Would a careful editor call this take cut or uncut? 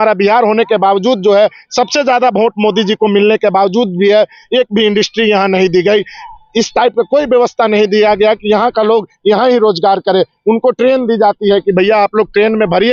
uncut